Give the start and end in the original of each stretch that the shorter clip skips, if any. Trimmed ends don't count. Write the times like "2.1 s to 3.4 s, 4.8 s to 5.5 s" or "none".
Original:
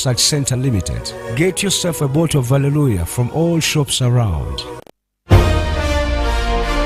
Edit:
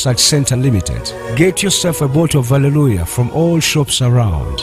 none